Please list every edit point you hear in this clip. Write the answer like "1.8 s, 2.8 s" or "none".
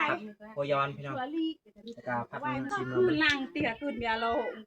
2.7 s